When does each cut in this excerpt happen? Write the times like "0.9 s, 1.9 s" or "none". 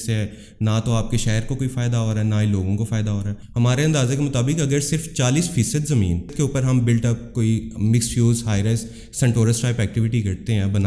3.4 s, 6.3 s